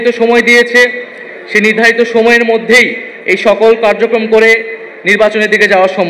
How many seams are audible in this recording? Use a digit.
0